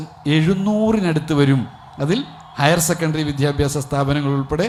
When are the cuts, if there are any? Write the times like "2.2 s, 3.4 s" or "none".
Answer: none